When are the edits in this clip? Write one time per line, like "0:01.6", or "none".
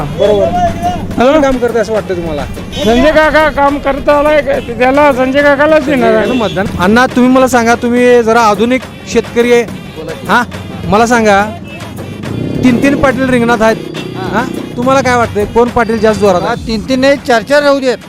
none